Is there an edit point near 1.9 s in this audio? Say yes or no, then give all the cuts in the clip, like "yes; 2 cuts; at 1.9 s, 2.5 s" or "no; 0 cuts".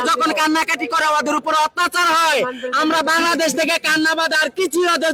no; 0 cuts